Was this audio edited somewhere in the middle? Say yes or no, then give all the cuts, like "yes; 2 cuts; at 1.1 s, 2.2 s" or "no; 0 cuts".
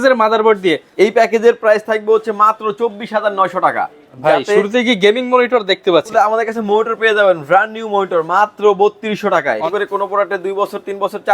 yes; 4 cuts; at 0.9 s, 4.0 s, 6.1 s, 9.7 s